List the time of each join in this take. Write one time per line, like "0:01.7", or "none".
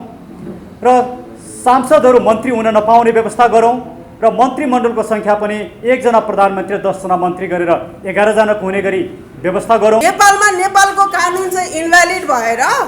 0:10.0